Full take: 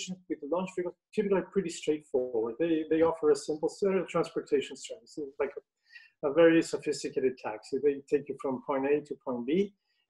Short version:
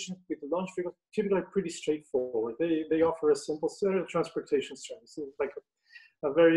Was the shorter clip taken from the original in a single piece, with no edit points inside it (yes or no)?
yes